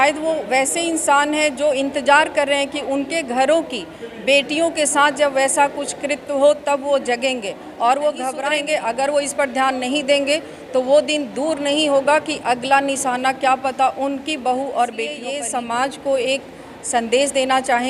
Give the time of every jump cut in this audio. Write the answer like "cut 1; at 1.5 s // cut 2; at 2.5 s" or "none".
cut 1; at 8.4 s // cut 2; at 15.3 s